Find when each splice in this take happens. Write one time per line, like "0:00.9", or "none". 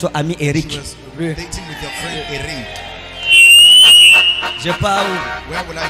none